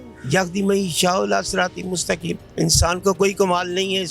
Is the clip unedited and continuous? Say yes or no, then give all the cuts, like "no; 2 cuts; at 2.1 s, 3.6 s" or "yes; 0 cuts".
yes; 0 cuts